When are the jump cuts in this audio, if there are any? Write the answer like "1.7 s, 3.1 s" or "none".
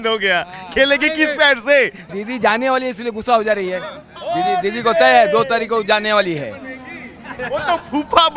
2.0 s

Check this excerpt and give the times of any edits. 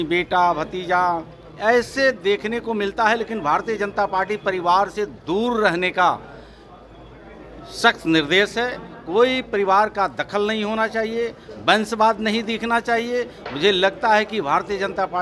none

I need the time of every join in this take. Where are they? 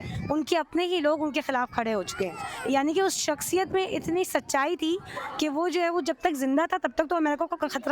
none

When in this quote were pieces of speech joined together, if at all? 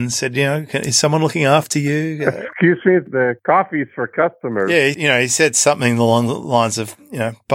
none

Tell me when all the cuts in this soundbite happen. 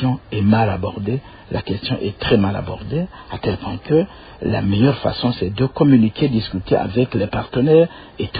none

